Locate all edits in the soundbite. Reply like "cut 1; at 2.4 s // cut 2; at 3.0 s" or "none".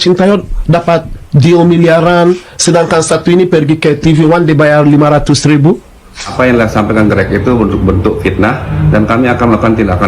cut 1; at 6.3 s